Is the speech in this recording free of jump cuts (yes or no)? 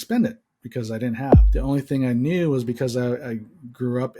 no